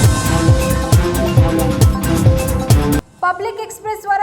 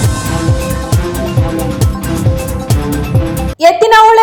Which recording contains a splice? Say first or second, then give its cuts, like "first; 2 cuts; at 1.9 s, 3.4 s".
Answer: first; 1 cut; at 3.0 s